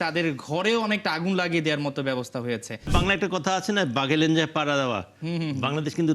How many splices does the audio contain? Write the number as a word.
one